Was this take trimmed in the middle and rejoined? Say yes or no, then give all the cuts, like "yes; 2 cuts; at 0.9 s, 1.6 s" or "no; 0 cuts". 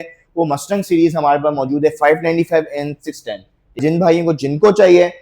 yes; 1 cut; at 3.8 s